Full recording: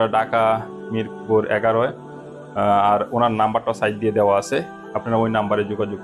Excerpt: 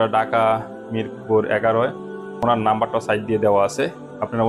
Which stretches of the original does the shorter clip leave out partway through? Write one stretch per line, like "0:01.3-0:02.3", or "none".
0:02.4-0:03.1